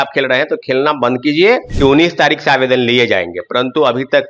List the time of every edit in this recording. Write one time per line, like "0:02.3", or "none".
0:01.7